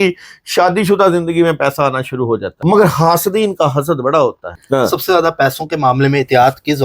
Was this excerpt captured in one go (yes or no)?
no